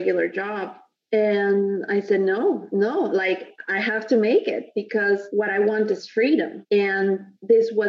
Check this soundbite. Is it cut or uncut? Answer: cut